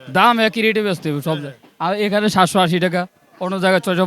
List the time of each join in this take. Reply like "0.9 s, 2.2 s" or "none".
none